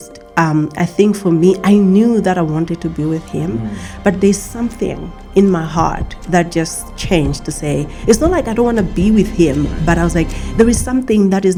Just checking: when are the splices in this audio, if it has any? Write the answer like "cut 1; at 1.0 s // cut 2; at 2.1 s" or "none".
none